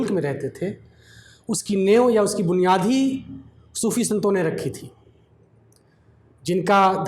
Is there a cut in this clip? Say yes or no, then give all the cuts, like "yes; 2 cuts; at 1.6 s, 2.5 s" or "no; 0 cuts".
no; 0 cuts